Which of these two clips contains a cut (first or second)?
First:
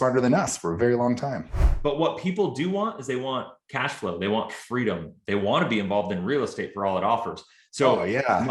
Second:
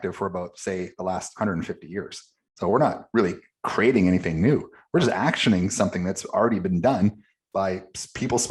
first